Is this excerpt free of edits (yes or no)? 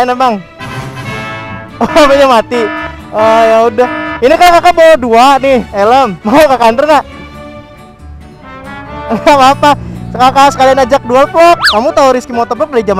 no